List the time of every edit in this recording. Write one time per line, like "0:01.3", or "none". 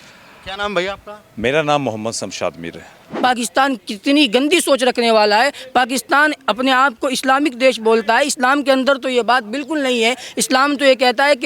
0:03.1